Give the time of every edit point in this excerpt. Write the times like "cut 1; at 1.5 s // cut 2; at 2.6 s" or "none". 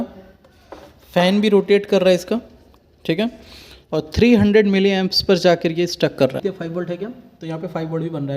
cut 1; at 6.4 s